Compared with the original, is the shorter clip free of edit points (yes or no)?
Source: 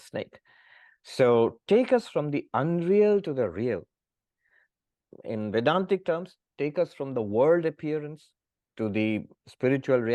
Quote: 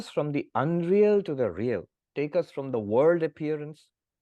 no